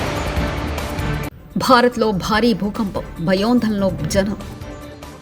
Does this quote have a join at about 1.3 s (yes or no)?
yes